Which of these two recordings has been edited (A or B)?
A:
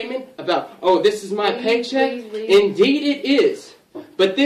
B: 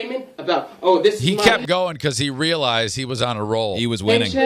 A